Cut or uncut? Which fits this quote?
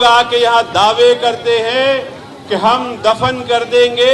uncut